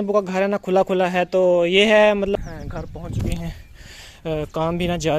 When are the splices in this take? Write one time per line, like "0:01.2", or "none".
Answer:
0:02.3